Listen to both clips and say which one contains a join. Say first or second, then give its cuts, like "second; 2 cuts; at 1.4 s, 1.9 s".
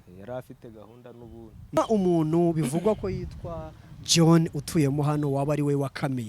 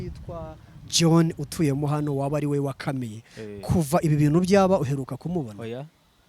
first; 1 cut; at 1.8 s